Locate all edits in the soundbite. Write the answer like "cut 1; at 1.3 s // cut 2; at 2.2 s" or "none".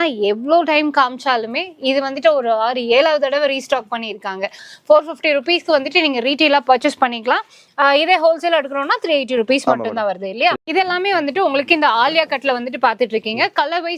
cut 1; at 4.6 s // cut 2; at 10.6 s